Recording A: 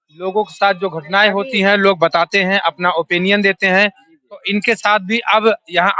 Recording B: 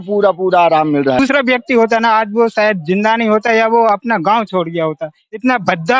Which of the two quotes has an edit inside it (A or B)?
B